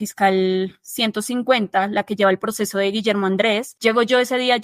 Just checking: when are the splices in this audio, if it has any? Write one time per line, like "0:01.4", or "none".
0:03.7

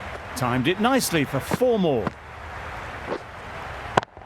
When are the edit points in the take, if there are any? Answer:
none

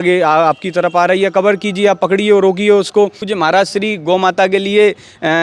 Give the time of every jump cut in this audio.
0:03.2

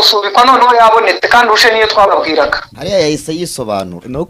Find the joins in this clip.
0:02.7

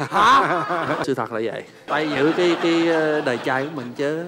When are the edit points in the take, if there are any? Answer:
0:01.0
0:01.8

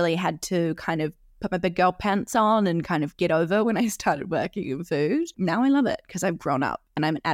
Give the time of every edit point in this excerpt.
0:05.4

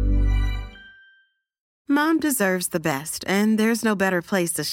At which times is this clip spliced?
0:01.6

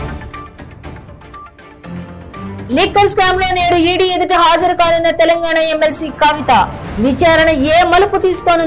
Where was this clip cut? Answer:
0:01.2

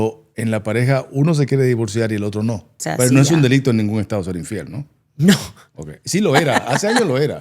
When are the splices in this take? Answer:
0:02.7

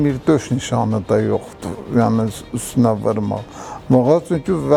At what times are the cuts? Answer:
none

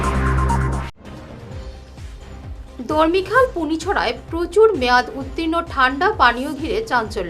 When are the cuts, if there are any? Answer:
0:00.9

